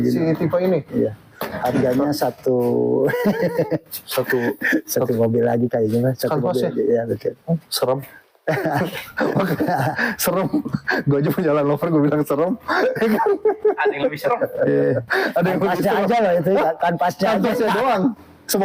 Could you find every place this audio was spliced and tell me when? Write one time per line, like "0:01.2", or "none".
none